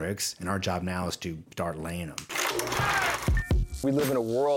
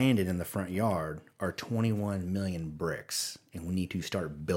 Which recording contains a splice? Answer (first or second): first